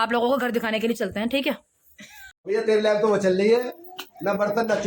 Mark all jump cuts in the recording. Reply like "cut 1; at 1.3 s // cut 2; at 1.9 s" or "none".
cut 1; at 2.4 s